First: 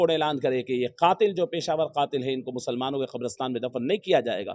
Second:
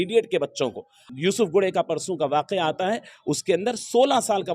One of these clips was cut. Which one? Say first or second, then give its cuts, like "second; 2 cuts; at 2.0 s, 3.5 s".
second; 1 cut; at 1.0 s